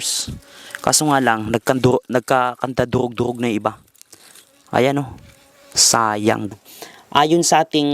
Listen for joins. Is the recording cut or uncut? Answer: cut